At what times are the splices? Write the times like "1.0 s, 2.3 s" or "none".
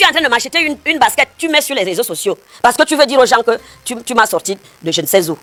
none